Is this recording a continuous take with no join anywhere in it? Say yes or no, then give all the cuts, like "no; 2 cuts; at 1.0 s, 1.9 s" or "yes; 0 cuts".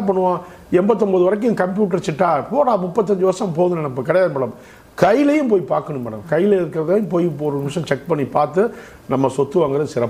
yes; 0 cuts